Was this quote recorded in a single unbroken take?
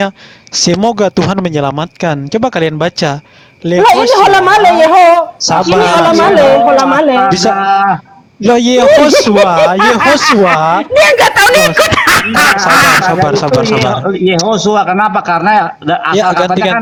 yes; 0 cuts

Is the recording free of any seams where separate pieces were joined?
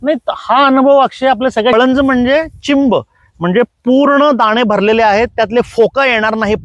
no; 1 cut; at 1.7 s

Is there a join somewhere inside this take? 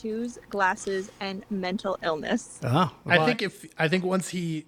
no; 0 cuts

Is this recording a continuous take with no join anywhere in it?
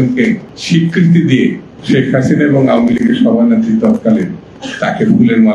yes; 0 cuts

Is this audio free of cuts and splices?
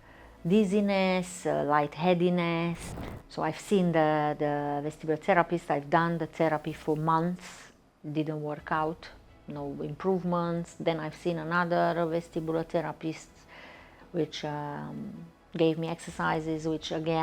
no; 1 cut; at 2.9 s

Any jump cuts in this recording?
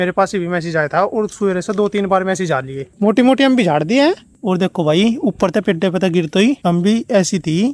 yes; 2 cuts; at 2.8 s, 6.6 s

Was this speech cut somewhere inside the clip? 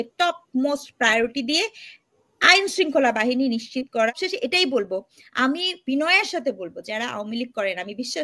yes; 1 cut; at 4.2 s

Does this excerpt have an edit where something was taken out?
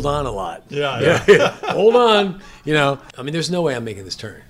yes; 1 cut; at 3.1 s

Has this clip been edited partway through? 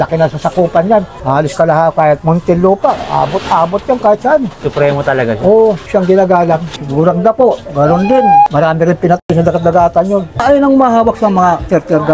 yes; 5 cuts; at 4.6 s, 5.8 s, 6.8 s, 8.5 s, 10.3 s

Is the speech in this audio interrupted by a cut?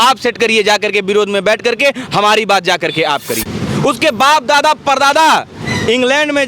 yes; 1 cut; at 3.3 s

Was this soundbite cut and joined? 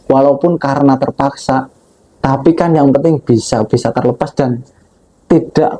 no; 0 cuts

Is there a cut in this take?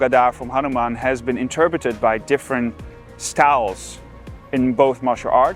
no; 0 cuts

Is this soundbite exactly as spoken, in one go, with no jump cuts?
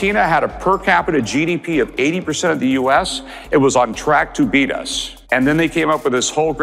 yes; 0 cuts

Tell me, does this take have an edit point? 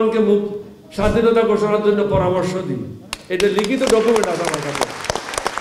no; 0 cuts

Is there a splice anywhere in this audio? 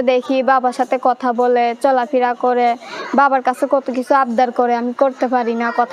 no; 0 cuts

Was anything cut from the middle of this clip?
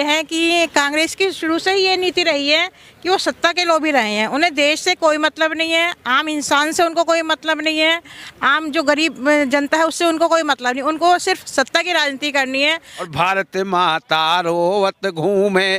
yes; 1 cut; at 13.0 s

